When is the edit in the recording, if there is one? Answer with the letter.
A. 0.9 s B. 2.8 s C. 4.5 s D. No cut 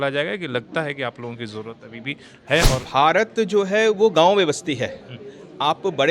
B